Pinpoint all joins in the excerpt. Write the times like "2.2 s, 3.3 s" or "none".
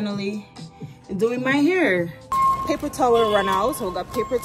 2.3 s